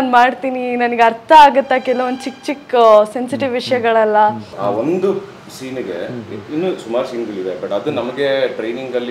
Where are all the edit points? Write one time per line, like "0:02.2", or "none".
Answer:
0:04.5